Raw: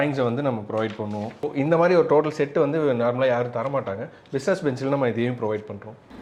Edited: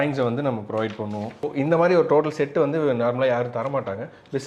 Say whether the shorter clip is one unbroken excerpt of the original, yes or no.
yes